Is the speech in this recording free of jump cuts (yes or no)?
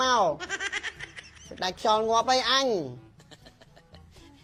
yes